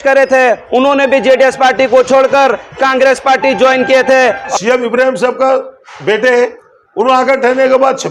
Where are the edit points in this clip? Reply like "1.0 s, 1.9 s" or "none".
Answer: 4.5 s